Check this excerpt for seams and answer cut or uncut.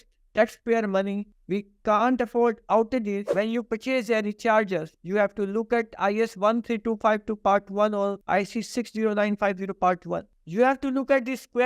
cut